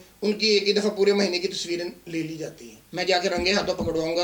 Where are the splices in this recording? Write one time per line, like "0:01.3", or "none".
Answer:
0:02.8

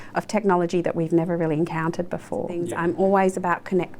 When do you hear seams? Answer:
0:02.6

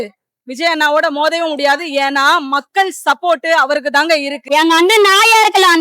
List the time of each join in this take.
0:04.3

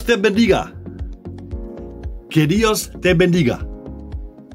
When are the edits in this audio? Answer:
0:00.9
0:02.3
0:03.6

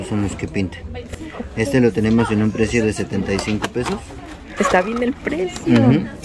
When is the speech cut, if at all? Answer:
none

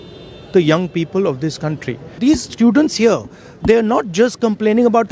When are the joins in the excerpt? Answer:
0:02.2

